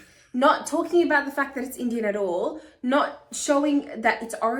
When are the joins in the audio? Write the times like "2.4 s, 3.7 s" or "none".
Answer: none